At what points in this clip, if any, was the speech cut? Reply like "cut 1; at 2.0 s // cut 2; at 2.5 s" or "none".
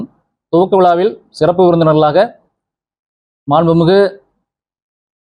none